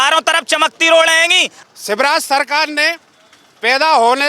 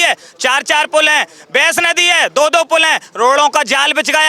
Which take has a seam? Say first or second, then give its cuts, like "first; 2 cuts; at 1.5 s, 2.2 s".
first; 1 cut; at 1.5 s